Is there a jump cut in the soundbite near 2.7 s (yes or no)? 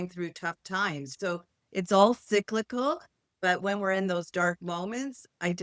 no